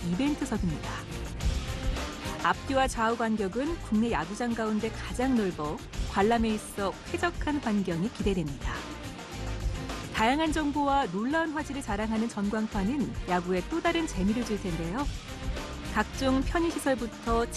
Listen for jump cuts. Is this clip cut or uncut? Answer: uncut